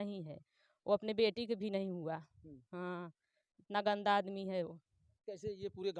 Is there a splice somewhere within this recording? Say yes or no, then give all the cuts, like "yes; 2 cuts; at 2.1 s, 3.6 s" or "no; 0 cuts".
no; 0 cuts